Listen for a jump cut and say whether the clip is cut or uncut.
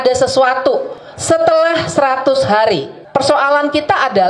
cut